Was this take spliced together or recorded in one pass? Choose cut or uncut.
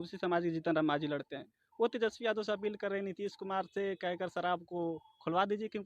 uncut